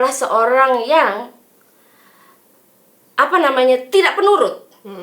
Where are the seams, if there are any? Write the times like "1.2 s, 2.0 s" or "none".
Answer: none